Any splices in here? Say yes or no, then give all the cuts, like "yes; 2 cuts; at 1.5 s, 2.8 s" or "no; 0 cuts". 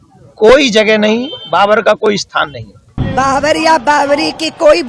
yes; 1 cut; at 2.9 s